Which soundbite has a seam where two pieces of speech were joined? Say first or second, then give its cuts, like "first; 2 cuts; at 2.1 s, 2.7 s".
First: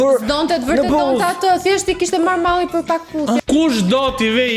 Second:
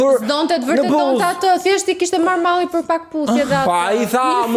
first; 1 cut; at 3.4 s